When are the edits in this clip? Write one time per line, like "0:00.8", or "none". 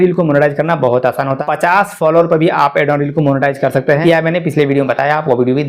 0:01.4
0:04.0